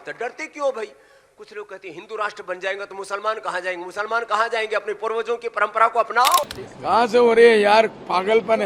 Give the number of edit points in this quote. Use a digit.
1